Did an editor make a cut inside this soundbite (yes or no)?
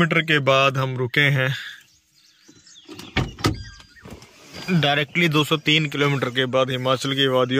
no